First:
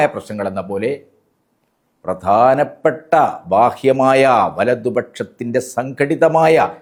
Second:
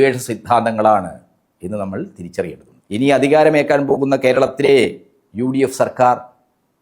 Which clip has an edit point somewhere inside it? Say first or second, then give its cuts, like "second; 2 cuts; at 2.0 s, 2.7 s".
second; 1 cut; at 2.7 s